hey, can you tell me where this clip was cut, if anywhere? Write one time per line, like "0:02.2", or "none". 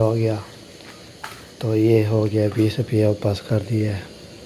none